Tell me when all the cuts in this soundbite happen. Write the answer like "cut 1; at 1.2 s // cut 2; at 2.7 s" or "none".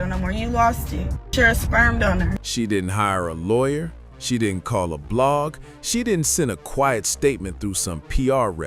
cut 1; at 2.4 s